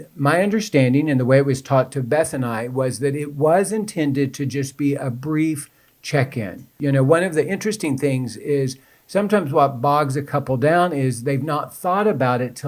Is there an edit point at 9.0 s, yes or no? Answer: no